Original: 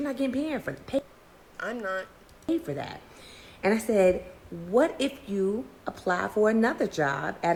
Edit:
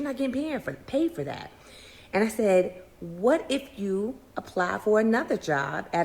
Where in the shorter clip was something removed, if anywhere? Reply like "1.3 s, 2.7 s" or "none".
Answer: 1.0 s